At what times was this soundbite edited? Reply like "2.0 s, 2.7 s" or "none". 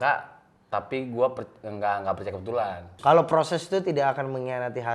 2.9 s